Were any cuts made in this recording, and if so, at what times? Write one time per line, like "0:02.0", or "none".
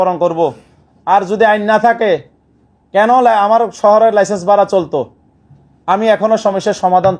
none